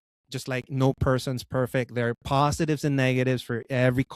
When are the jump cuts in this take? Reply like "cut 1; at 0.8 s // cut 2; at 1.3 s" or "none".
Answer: none